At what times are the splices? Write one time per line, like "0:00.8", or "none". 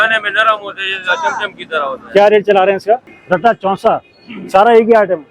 0:03.1

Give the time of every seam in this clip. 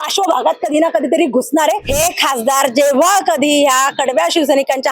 0:01.9

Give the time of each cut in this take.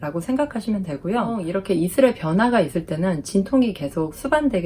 0:01.4

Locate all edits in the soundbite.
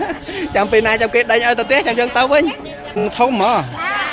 0:03.0

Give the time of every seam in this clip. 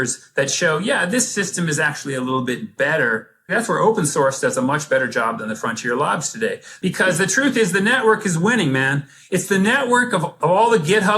0:03.5
0:06.7
0:10.4

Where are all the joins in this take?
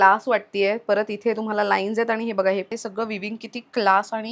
0:02.7

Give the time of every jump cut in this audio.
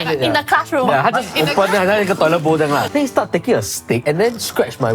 0:02.8
0:04.0

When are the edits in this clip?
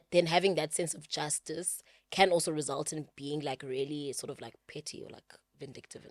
none

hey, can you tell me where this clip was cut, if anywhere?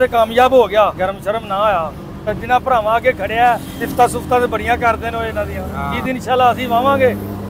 0:01.0
0:02.3
0:03.8
0:06.0

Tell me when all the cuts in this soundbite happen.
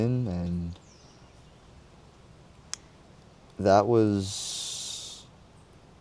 none

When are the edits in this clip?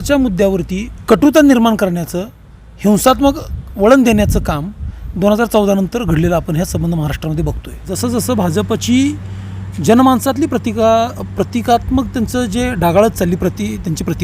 0:00.9
0:07.8

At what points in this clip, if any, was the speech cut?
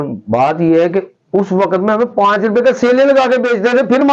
none

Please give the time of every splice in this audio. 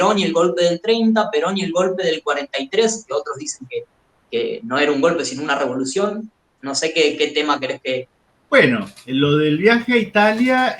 none

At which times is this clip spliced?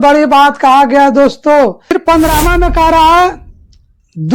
0:01.9

